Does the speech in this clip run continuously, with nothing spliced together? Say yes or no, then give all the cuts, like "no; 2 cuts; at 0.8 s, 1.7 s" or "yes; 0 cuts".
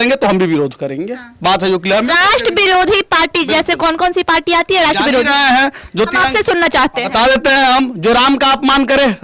yes; 0 cuts